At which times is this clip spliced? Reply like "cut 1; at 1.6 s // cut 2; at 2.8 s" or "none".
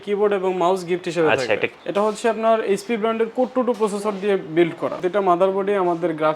cut 1; at 1.8 s // cut 2; at 5.0 s